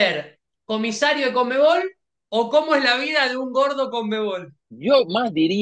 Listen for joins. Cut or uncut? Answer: cut